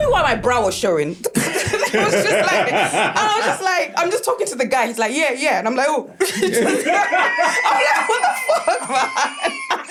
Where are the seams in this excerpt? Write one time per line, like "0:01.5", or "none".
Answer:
none